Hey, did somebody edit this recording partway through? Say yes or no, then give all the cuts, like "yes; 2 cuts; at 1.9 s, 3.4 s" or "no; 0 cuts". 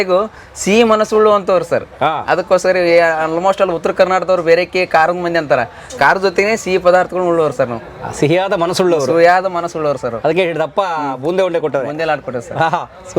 no; 0 cuts